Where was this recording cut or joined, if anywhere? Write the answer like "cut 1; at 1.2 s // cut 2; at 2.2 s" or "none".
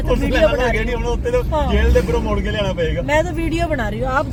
none